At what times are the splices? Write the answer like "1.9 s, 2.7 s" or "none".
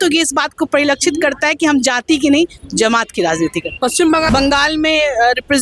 4.3 s